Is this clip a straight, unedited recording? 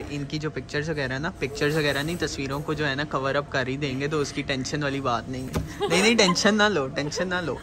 yes; 0 cuts

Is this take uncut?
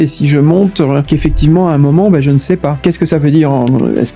no; 2 cuts; at 1.1 s, 2.8 s

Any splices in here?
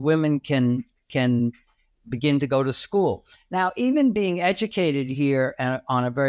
no; 0 cuts

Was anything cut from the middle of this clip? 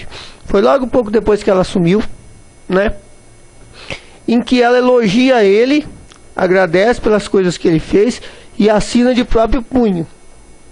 yes; 1 cut; at 5.0 s

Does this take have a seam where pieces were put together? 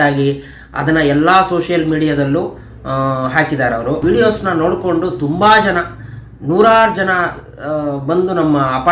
yes; 1 cut; at 4.0 s

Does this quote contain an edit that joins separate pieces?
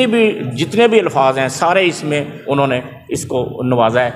no; 0 cuts

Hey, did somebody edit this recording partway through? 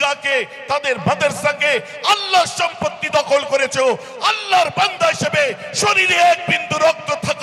no; 0 cuts

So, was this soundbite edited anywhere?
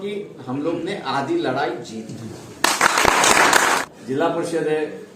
yes; 1 cut; at 3.8 s

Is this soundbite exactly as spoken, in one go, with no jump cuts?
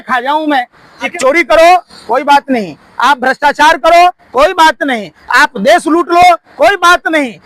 no; 1 cut; at 1.1 s

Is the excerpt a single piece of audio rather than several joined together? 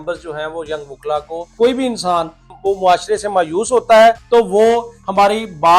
no; 3 cuts; at 1.5 s, 2.5 s, 4.2 s

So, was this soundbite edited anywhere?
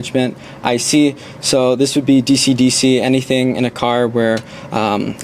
no; 0 cuts

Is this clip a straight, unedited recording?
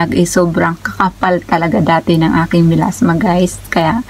yes; 0 cuts

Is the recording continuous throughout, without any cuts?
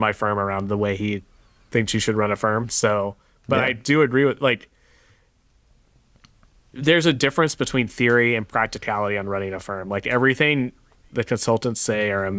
yes; 0 cuts

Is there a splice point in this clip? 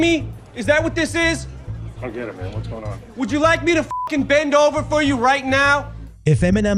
no; 0 cuts

